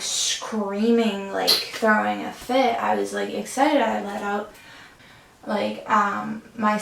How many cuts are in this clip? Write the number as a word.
one